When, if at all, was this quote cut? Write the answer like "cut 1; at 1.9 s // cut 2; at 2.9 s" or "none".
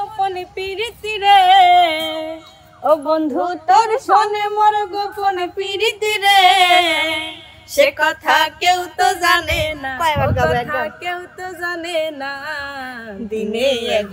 none